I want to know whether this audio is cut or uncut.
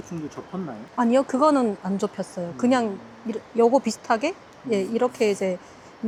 uncut